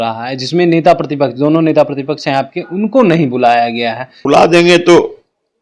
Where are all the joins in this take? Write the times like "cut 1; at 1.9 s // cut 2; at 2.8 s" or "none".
cut 1; at 4.1 s